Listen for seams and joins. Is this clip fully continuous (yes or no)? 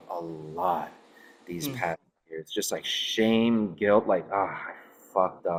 yes